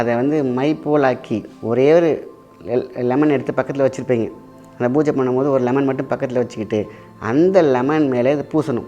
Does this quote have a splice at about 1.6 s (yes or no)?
no